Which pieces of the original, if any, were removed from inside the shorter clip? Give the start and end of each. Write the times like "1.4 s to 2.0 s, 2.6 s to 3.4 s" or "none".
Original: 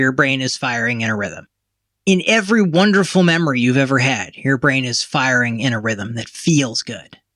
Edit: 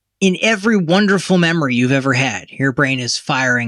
none